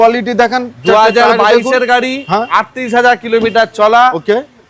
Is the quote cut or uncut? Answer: uncut